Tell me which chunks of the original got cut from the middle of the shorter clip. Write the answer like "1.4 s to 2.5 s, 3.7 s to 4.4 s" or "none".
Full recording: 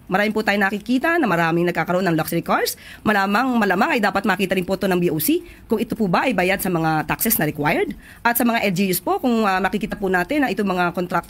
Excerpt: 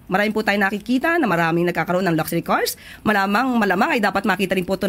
none